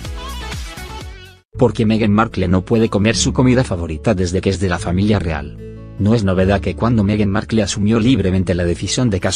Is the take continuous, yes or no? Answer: yes